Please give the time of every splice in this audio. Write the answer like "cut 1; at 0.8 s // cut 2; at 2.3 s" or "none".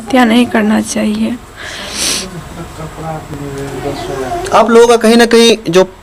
none